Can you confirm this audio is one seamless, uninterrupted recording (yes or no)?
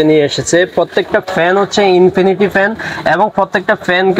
yes